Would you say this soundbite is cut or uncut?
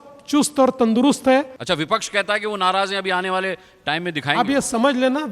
cut